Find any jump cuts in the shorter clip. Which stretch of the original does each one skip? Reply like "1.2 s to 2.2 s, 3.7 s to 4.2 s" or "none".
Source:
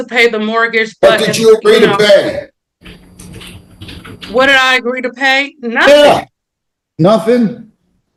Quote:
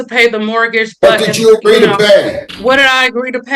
2.5 s to 4.2 s

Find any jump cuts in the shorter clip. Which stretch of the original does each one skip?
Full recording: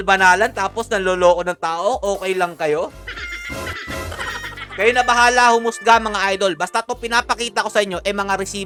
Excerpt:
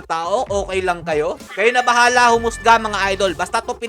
3.0 s to 4.7 s

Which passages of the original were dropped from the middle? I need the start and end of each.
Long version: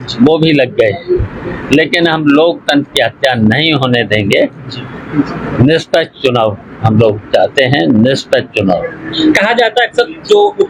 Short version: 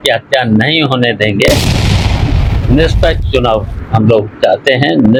none

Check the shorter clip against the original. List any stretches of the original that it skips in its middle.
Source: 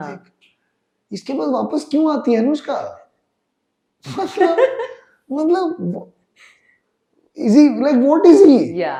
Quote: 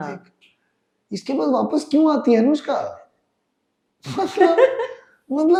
none

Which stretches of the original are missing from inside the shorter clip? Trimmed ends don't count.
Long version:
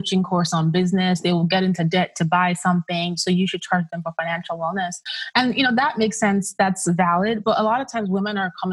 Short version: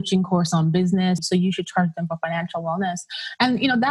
1.2 s to 3.1 s

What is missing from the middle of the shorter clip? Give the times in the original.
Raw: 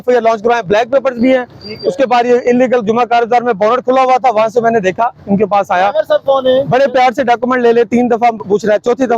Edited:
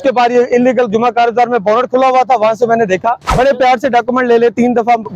5.3 s to 6.7 s

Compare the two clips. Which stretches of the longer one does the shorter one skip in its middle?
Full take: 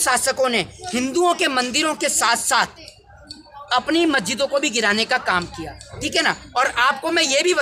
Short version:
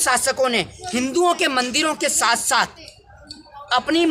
none

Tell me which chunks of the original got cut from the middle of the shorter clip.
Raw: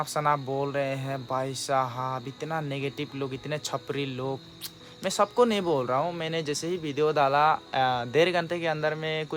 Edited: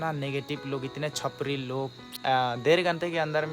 4.7 s to 7.7 s

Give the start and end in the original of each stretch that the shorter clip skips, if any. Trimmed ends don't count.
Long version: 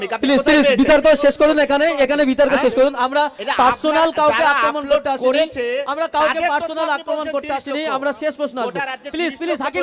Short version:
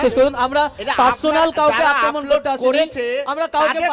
none

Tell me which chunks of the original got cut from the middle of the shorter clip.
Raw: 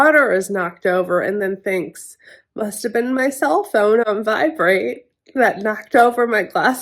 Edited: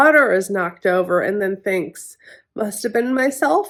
none

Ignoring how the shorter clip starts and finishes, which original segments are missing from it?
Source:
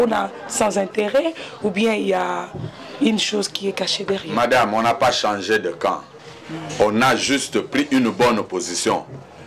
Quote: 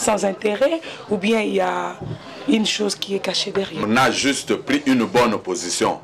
4.4 s to 6.9 s

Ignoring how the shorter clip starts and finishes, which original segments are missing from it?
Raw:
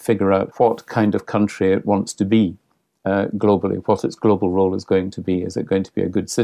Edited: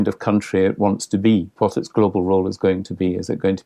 2.6 s to 3.8 s

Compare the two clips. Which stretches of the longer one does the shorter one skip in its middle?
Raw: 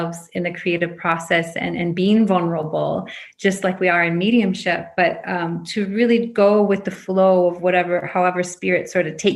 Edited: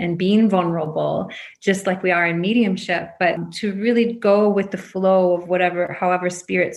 5.2 s to 5.6 s

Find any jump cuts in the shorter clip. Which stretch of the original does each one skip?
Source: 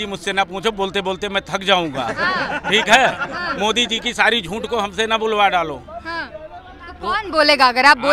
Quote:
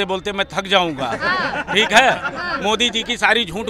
none

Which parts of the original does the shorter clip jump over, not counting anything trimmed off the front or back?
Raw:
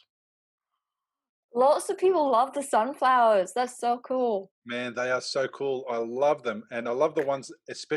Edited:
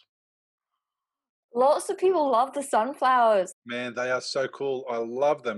3.5 s to 4.5 s

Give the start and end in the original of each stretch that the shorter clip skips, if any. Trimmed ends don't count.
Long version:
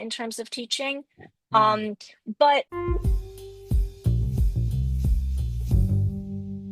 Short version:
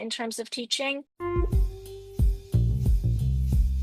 1.2 s to 2.7 s

